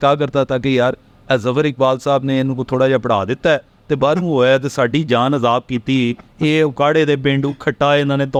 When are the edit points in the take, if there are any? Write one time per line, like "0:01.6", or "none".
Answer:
none